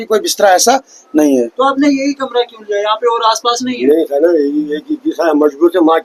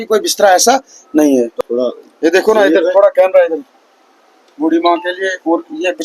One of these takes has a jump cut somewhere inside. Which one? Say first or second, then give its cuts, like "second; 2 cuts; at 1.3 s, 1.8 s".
second; 1 cut; at 1.5 s